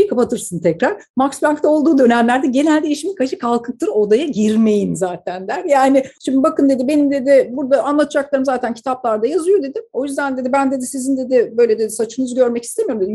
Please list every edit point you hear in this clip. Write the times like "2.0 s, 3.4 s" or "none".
6.1 s